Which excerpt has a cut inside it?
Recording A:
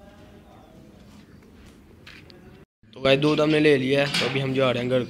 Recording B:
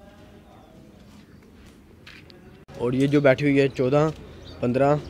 B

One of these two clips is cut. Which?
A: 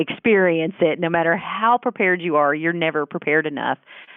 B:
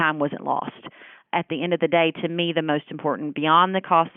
B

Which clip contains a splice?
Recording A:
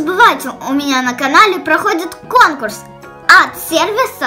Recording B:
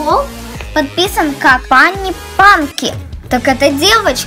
B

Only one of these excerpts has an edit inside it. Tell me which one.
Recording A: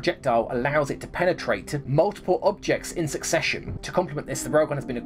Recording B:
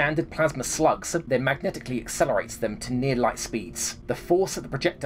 B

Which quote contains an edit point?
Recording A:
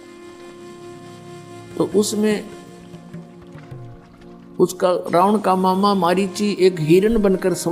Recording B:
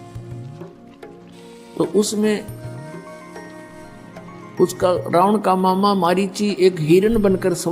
A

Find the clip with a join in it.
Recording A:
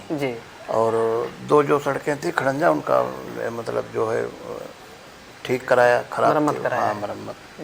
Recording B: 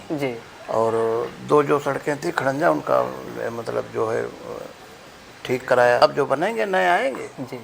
B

